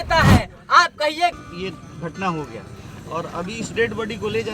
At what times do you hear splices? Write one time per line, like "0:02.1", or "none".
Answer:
0:01.3